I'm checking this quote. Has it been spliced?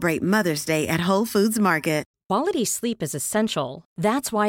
yes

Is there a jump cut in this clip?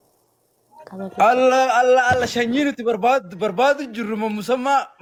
no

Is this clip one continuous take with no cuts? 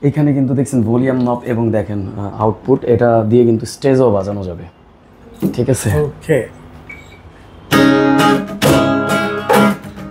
yes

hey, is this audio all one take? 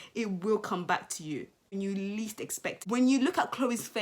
no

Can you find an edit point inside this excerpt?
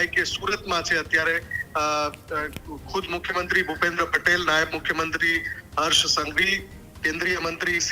no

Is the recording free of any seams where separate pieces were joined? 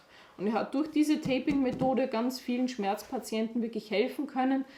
yes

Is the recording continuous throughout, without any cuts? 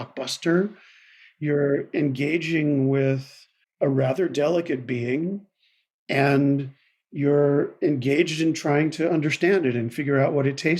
yes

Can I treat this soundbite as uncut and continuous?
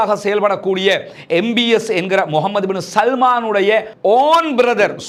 yes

